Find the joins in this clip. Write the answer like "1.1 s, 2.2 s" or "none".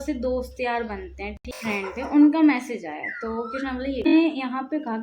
1.5 s, 4.1 s